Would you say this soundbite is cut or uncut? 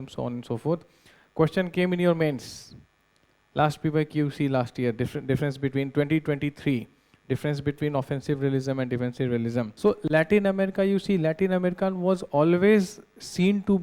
cut